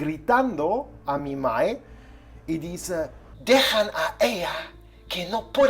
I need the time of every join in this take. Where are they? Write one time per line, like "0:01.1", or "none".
0:03.3